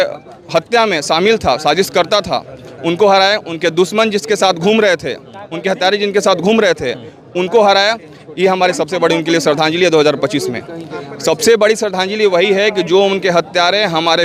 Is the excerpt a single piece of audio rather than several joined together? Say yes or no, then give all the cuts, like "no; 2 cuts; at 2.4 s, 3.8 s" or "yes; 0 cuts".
yes; 0 cuts